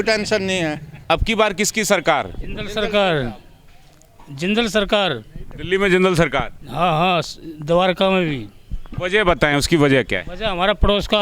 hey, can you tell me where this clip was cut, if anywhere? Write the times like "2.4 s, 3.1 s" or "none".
0.9 s